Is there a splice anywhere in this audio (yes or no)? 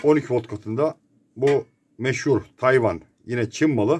no